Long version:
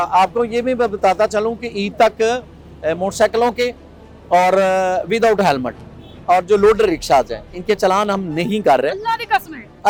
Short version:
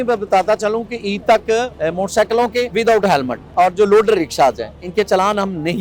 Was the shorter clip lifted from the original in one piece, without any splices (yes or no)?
no